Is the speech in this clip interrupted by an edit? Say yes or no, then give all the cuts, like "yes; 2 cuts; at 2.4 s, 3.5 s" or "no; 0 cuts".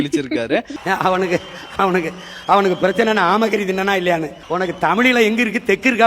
yes; 1 cut; at 4.4 s